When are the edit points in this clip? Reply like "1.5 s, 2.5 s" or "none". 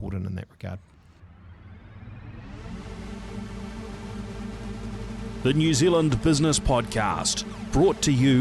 1.5 s